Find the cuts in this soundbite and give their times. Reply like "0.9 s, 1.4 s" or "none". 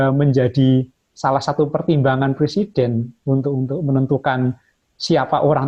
none